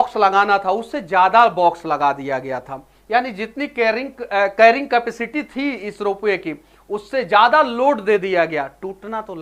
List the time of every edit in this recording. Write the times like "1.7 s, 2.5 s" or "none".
none